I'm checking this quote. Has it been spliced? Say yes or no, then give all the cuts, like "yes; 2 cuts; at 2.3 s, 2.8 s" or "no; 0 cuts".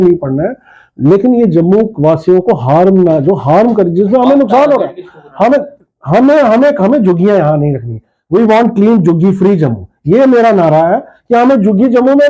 no; 0 cuts